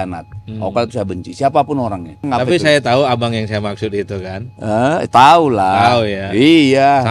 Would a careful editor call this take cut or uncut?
cut